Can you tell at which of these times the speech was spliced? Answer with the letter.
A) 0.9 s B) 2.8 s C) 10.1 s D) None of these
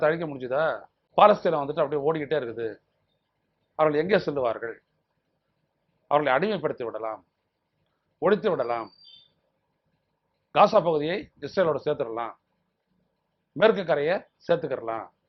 A